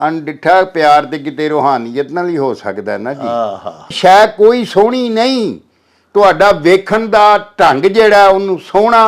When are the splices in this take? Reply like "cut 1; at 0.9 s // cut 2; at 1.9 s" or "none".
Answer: cut 1; at 3.9 s